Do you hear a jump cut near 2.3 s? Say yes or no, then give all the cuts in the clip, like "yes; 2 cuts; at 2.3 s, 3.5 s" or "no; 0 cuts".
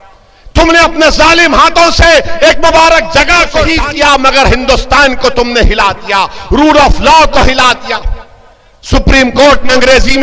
no; 1 cut; at 3.7 s